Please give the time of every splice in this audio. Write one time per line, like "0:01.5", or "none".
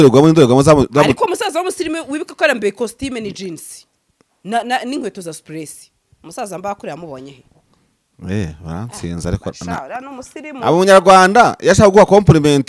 none